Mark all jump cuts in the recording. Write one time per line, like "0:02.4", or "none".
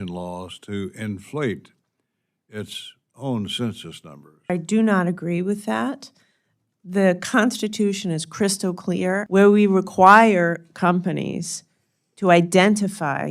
0:04.5
0:09.3